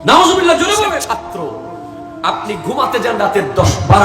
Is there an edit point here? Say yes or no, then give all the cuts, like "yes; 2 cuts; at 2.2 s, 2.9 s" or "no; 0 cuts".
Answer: yes; 1 cut; at 1.0 s